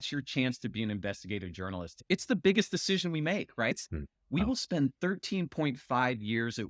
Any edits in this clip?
yes; 1 cut; at 2.0 s

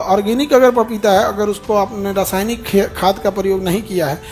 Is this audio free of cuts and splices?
yes; 0 cuts

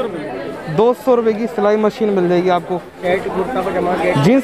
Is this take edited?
yes; 1 cut; at 3.0 s

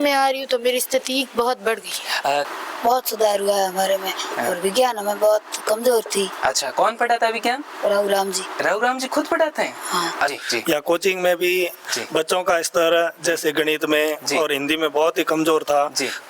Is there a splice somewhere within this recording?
yes; 2 cuts; at 2.5 s, 10.4 s

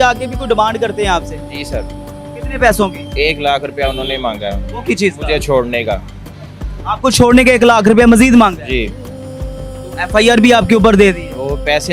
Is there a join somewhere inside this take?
no; 0 cuts

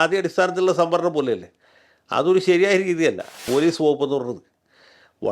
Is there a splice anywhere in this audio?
yes; 1 cut; at 3.4 s

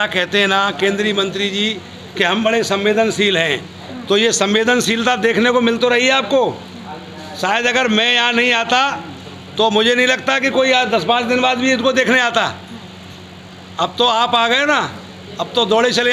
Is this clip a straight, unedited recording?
yes; 0 cuts

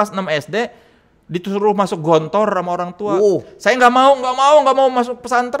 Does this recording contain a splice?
no; 0 cuts

